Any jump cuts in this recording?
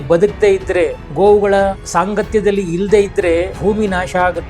yes; 3 cuts; at 1.0 s, 1.8 s, 3.5 s

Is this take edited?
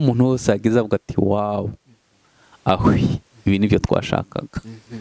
no; 0 cuts

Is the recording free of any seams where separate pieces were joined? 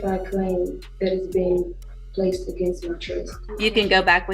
no; 1 cut; at 3.4 s

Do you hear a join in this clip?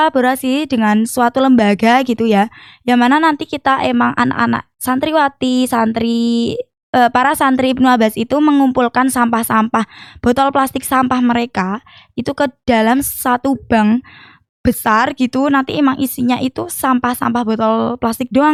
no; 0 cuts

